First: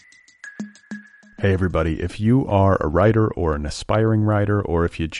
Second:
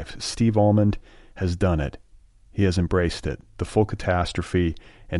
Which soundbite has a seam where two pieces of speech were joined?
first; 1 cut; at 0.9 s

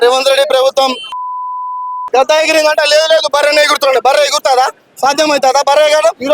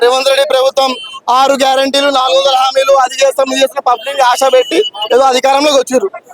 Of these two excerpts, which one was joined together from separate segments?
second; 1 cut; at 1.0 s

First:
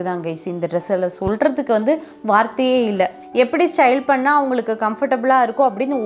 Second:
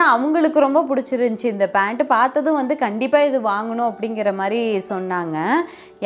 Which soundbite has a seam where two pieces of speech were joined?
first; 1 cut; at 3.2 s

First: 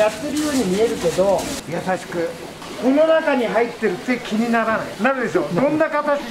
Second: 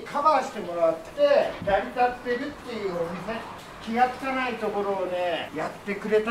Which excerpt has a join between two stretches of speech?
second; 3 cuts; at 1.6 s, 3.6 s, 5.5 s

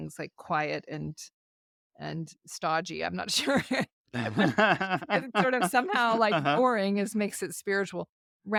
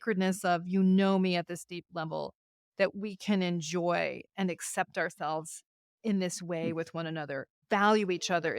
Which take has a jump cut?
second; 1 cut; at 7.6 s

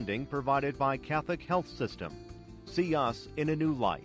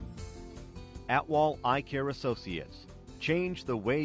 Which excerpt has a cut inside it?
second; 1 cut; at 1.0 s

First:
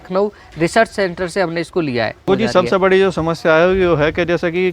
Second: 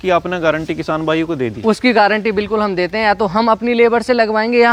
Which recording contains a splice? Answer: first; 1 cut; at 2.3 s

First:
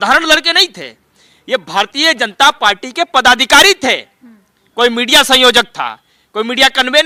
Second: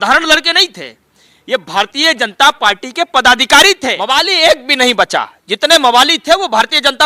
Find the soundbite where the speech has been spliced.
second; 1 cut; at 4.0 s

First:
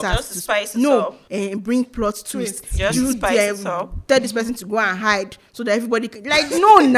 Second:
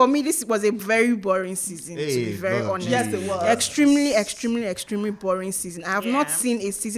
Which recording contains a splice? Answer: first; 1 cut; at 1.2 s

